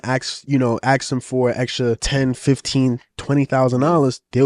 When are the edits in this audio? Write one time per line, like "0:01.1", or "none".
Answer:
0:02.0